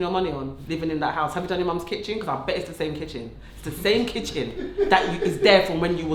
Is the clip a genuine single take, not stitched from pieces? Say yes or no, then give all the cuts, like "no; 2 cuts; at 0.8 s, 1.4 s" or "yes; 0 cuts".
yes; 0 cuts